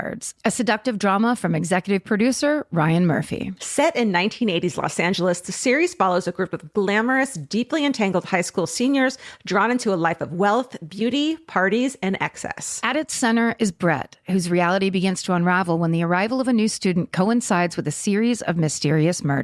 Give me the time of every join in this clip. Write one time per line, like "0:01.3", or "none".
none